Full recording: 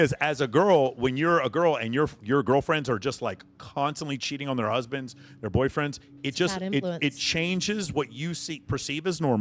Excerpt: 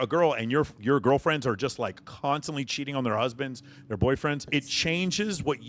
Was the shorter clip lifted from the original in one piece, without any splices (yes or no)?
no